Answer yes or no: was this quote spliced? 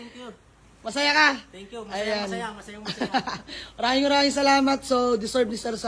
no